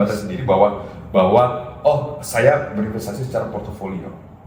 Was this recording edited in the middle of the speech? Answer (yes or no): no